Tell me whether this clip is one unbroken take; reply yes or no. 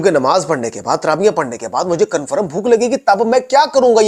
yes